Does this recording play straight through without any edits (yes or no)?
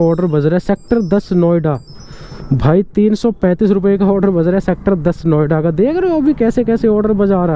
yes